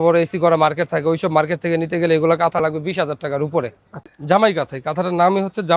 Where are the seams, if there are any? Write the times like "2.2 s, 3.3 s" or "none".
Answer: 4.2 s